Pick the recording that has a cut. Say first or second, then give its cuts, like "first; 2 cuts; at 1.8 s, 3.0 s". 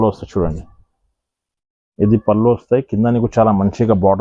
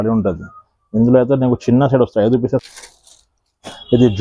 second; 1 cut; at 2.6 s